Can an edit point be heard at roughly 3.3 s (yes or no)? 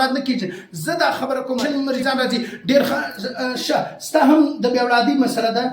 no